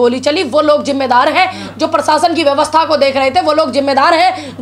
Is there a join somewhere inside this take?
no; 0 cuts

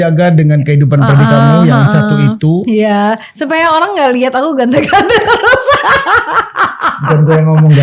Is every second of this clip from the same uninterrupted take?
yes; 0 cuts

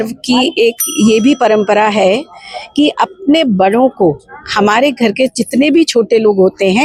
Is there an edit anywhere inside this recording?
no; 0 cuts

